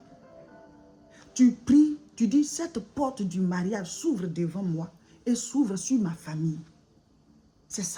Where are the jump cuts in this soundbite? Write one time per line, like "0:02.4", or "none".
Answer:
none